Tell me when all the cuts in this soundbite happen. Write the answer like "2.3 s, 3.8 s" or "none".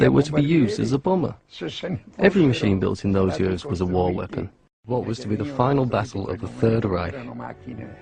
none